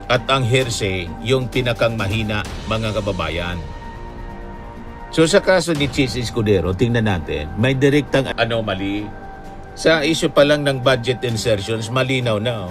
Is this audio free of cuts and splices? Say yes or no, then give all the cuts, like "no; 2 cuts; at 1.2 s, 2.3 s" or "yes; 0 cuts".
no; 1 cut; at 8.3 s